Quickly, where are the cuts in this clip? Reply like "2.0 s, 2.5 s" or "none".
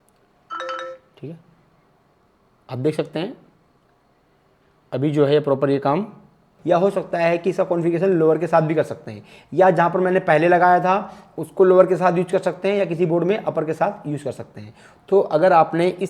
6.5 s